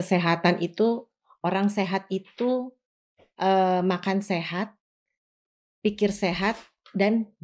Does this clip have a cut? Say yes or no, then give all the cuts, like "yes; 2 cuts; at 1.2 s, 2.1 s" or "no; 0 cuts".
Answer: no; 0 cuts